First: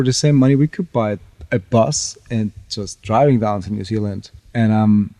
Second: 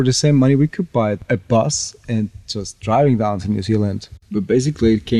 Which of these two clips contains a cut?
second; 2 cuts; at 1.2 s, 4.2 s

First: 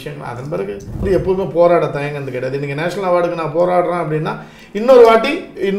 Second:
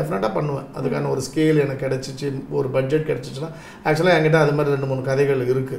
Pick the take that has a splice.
first; 1 cut; at 1.0 s

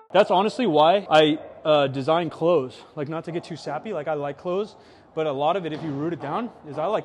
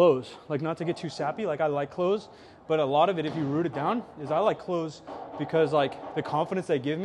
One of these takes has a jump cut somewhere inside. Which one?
first; 1 cut; at 1.0 s

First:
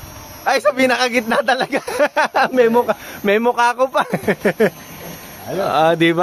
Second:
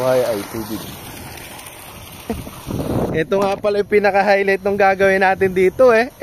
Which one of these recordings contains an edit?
second; 1 cut; at 2.3 s

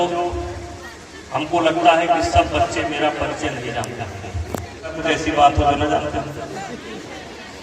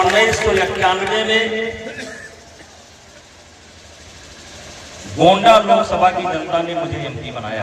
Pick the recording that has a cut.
first; 1 cut; at 5.0 s

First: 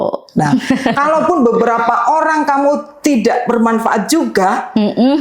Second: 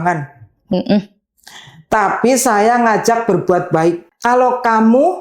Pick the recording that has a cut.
second; 1 cut; at 4.1 s

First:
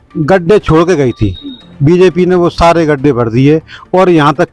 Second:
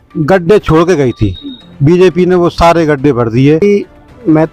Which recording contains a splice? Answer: second; 1 cut; at 3.6 s

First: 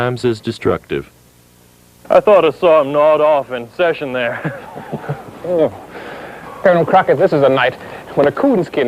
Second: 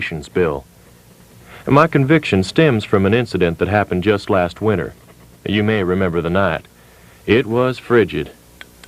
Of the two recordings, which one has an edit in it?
first; 1 cut; at 4.6 s

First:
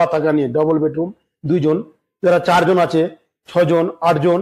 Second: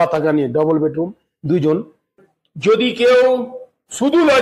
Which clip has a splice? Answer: second; 1 cut; at 2.1 s

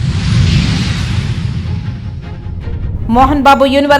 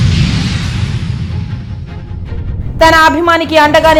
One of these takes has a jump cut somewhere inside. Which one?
first; 1 cut; at 2.9 s

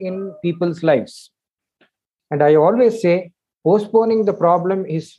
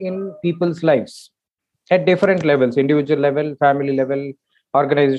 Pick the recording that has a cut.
first; 1 cut; at 1.7 s

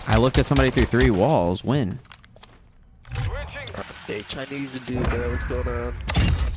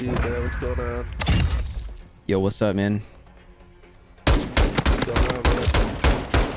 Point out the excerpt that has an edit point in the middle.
first; 1 cut; at 3.8 s

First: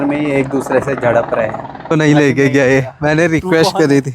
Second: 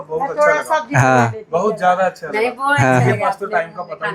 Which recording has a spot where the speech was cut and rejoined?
first; 1 cut; at 1.9 s

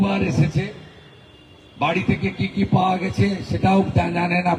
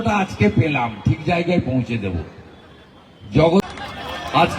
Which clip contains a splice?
second; 1 cut; at 3.6 s

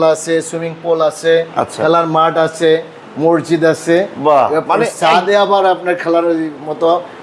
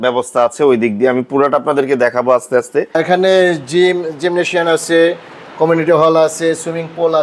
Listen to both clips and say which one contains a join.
second; 1 cut; at 3.0 s

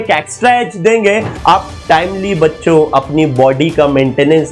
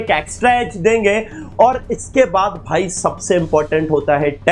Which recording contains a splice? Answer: first; 1 cut; at 1.3 s

